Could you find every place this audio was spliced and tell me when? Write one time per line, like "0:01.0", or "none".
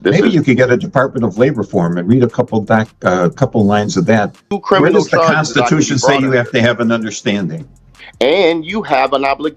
0:04.5
0:08.0